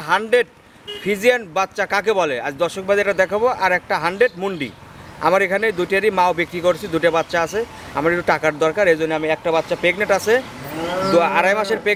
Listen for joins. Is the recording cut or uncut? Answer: uncut